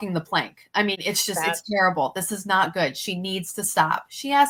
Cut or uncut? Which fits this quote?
uncut